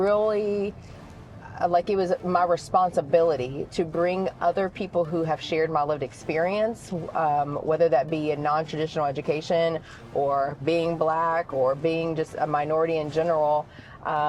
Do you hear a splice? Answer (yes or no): no